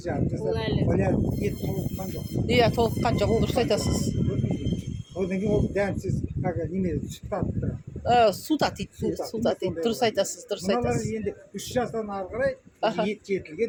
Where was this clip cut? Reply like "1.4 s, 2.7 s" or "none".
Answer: none